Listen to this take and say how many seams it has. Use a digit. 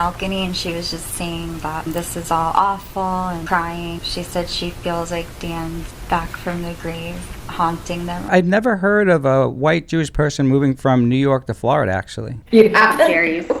2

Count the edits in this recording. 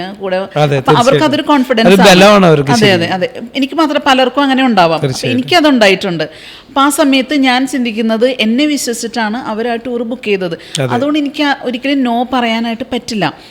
0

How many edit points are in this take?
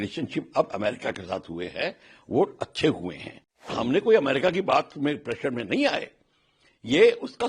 1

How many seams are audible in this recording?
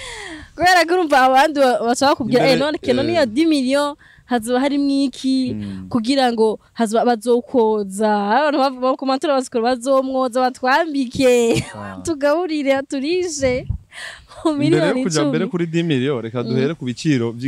0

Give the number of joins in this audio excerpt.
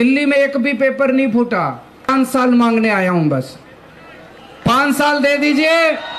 1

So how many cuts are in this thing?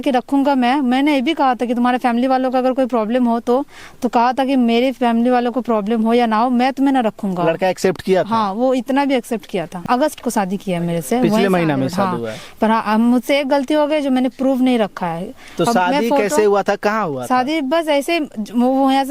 1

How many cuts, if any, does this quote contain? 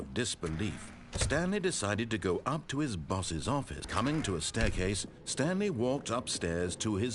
1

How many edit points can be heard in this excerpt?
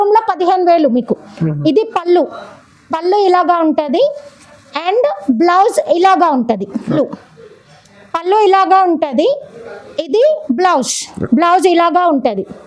1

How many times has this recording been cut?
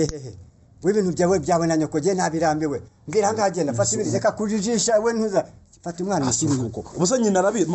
0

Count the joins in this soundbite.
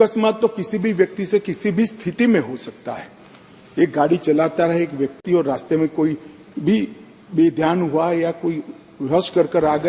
0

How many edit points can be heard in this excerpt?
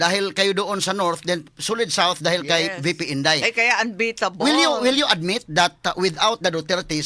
0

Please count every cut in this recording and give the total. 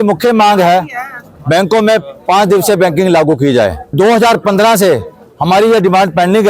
1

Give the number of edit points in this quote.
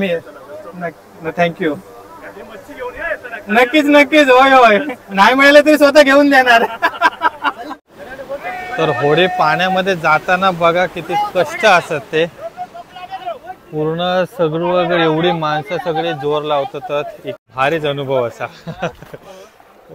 2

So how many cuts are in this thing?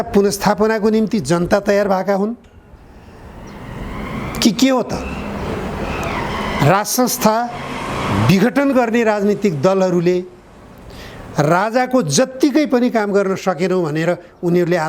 0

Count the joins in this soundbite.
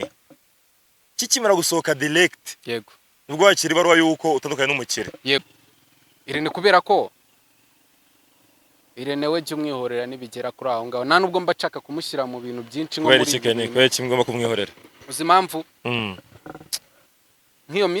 1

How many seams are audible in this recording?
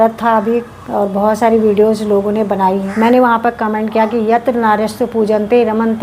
1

